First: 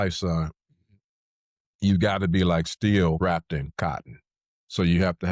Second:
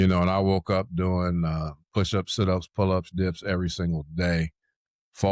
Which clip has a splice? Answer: first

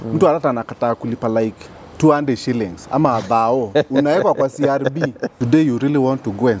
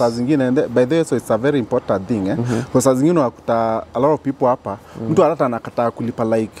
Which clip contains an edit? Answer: first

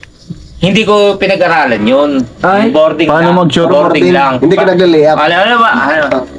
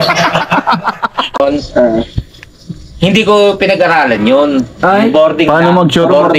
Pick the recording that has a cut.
second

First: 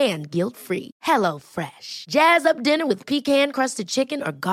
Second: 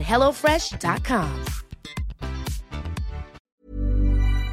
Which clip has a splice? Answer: second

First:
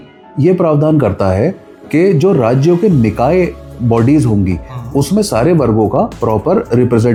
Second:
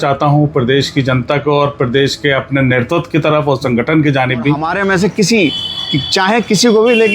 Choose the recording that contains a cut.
second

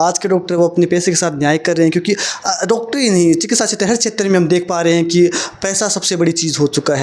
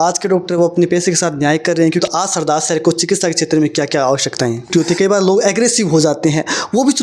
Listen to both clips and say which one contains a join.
second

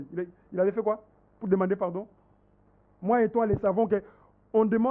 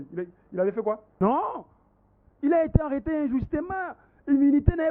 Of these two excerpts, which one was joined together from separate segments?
second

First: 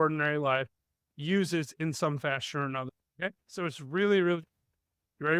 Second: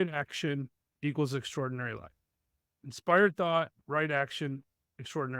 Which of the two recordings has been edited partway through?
first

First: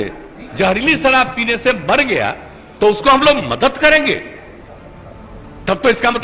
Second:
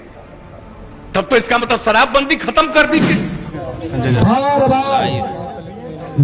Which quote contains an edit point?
second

